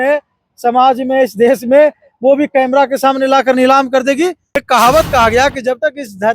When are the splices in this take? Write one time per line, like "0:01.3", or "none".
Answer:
0:04.6